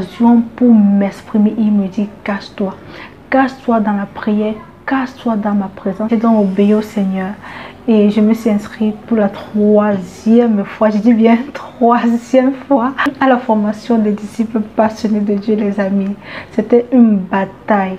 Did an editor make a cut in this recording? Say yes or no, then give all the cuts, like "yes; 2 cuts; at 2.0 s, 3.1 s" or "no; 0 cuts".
yes; 1 cut; at 13.1 s